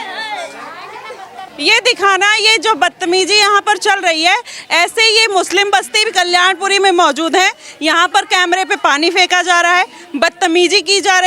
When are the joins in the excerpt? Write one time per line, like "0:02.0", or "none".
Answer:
0:01.5